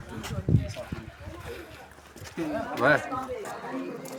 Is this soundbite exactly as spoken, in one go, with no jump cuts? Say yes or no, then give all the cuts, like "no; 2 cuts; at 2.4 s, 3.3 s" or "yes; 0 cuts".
yes; 0 cuts